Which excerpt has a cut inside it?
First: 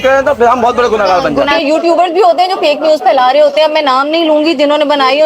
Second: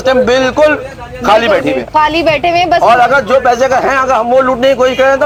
first; 1 cut; at 1.5 s

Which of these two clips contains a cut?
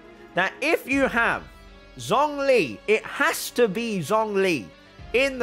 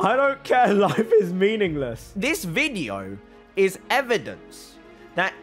second; 1 cut; at 2.0 s

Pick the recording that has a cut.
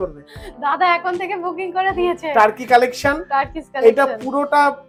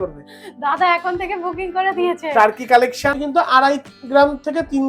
second; 1 cut; at 3.2 s

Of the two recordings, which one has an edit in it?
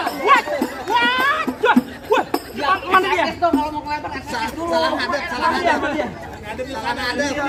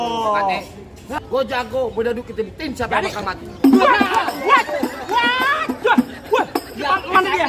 second; 1 cut; at 1.2 s

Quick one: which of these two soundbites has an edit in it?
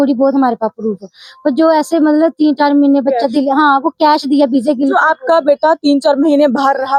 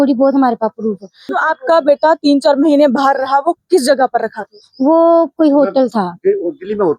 second; 1 cut; at 1.4 s

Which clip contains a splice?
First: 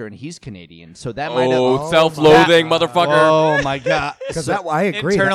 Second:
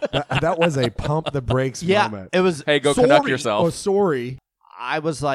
second; 1 cut; at 4.3 s

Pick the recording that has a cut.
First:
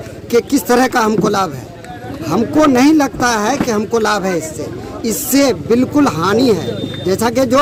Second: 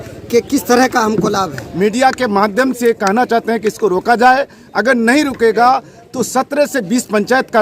second; 1 cut; at 1.6 s

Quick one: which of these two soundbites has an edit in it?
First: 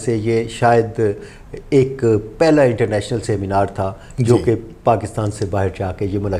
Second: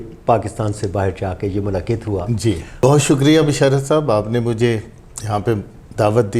second; 1 cut; at 2.8 s

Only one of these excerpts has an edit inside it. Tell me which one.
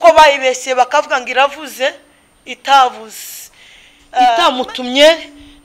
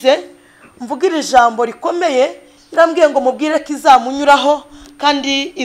first; 1 cut; at 4.4 s

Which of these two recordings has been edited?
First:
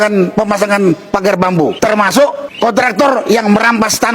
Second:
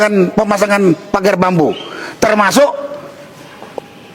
first; 2 cuts; at 1.8 s, 2.5 s

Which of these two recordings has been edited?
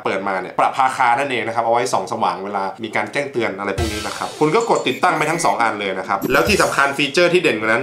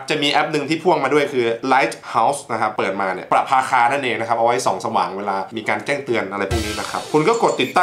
first; 1 cut; at 6.2 s

